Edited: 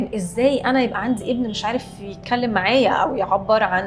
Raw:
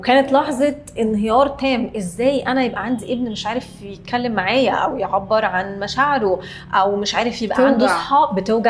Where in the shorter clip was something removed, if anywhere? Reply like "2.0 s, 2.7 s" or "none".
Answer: none